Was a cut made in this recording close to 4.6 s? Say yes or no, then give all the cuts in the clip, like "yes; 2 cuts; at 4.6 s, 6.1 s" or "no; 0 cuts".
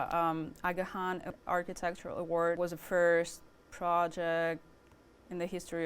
no; 2 cuts; at 1.3 s, 2.6 s